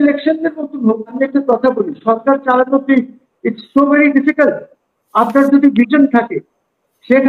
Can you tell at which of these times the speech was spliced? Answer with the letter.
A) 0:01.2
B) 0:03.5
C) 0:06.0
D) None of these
A